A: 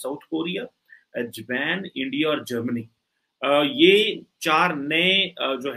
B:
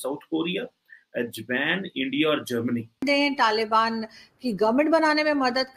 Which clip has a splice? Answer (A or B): B